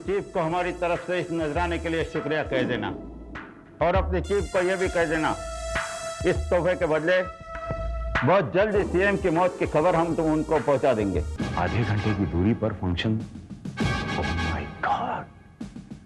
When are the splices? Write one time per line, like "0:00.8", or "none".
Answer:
0:11.3